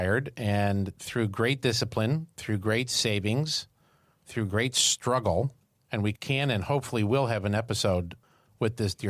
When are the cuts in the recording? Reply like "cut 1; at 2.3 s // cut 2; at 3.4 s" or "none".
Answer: cut 1; at 6.1 s